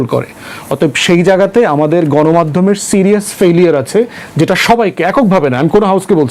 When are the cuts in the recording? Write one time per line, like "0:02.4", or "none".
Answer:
none